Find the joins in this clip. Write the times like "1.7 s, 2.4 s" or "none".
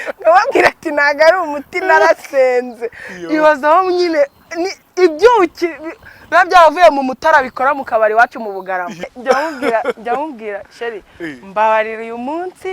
9.1 s

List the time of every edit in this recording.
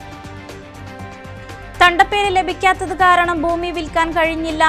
none

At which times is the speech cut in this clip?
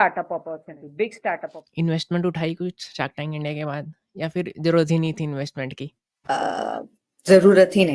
1.6 s

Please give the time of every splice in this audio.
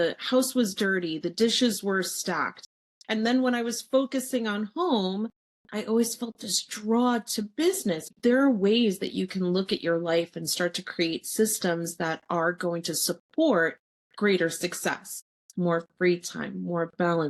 8.1 s

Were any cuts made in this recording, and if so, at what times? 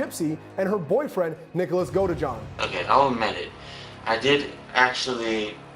2.6 s

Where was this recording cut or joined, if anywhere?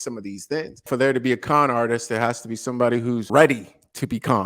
0.9 s, 3.3 s

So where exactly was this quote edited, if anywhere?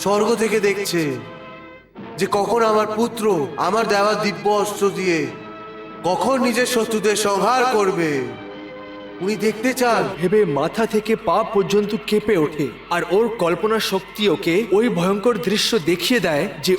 10.1 s

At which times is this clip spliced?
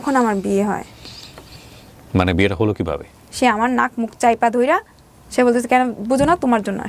3.0 s

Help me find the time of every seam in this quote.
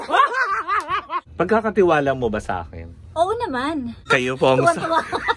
1.3 s, 4.0 s

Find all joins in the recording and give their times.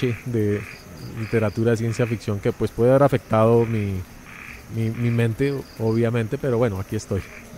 none

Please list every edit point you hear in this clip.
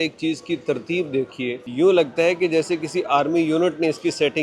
1.6 s

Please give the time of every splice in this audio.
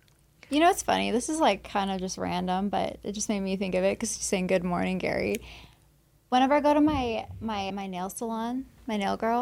7.7 s

